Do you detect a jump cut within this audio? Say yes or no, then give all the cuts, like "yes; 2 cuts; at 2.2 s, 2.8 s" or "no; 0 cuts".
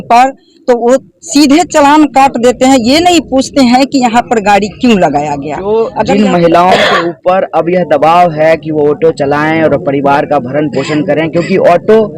yes; 1 cut; at 5.5 s